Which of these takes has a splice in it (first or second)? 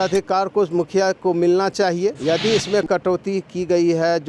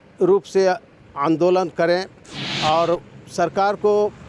first